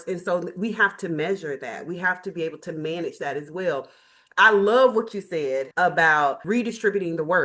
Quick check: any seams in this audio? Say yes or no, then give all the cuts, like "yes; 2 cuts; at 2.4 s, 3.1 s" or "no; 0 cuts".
no; 0 cuts